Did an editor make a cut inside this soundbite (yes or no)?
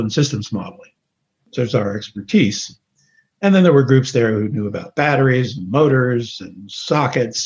no